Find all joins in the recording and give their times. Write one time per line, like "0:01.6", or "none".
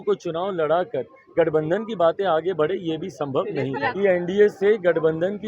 0:03.9